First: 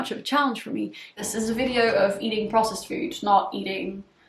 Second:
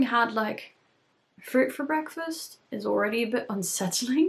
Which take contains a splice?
first; 1 cut; at 1.1 s

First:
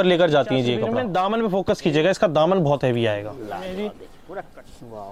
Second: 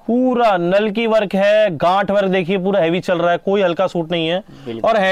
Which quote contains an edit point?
first; 2 cuts; at 0.9 s, 4.1 s

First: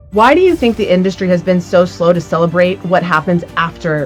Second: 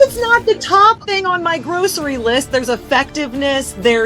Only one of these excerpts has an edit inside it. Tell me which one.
second; 1 cut; at 1.0 s

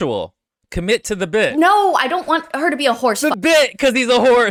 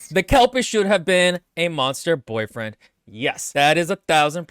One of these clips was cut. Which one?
second; 1 cut; at 3.4 s

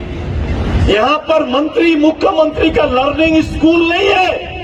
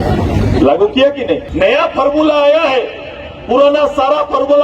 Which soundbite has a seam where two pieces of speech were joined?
second; 1 cut; at 1.5 s

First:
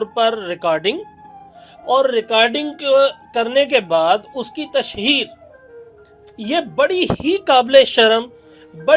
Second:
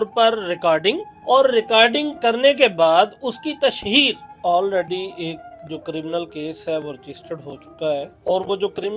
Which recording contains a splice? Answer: second; 4 cuts; at 1.1 s, 2.1 s, 4.3 s, 8.1 s

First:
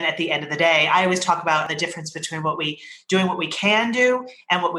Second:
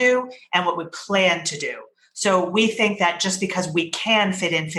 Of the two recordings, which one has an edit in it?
first; 1 cut; at 1.7 s

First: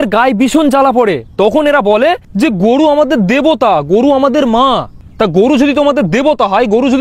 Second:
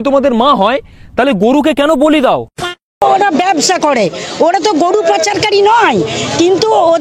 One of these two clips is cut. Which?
second; 1 cut; at 3.0 s

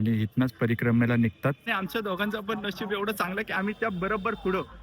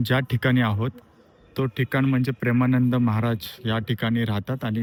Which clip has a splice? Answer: first; 1 cut; at 1.7 s

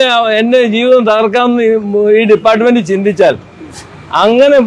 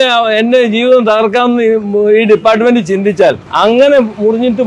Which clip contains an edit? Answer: second; 1 cut; at 3.5 s

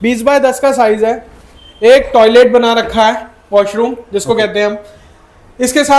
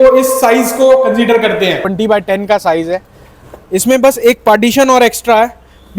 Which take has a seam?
second; 1 cut; at 1.9 s

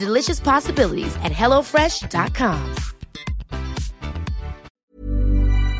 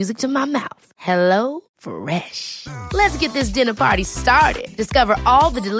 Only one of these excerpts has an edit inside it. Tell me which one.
first; 1 cut; at 4.7 s

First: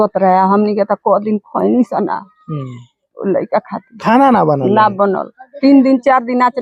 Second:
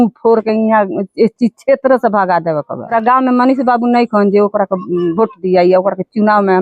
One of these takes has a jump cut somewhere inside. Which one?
second; 1 cut; at 2.9 s

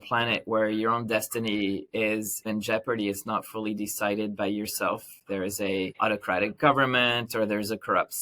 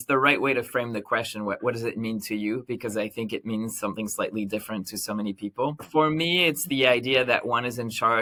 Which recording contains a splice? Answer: first; 1 cut; at 2.4 s

